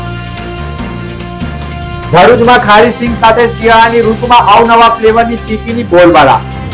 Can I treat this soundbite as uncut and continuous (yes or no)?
no